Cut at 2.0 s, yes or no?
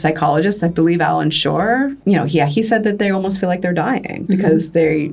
yes